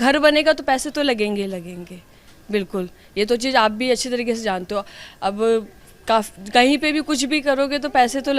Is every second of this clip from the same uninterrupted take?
yes; 0 cuts

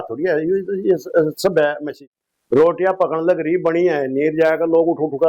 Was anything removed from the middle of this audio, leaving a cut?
yes; 1 cut; at 1.9 s

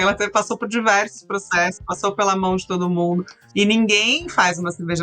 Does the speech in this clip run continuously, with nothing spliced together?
no; 1 cut; at 3.3 s

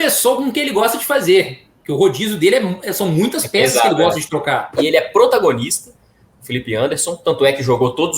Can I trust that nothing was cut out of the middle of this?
no; 1 cut; at 4.7 s

